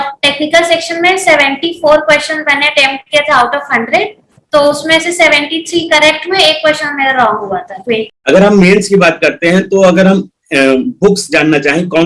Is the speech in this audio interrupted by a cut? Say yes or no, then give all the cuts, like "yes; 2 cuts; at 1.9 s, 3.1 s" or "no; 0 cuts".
yes; 1 cut; at 8.1 s